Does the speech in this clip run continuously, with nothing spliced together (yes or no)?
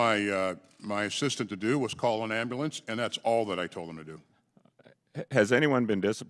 yes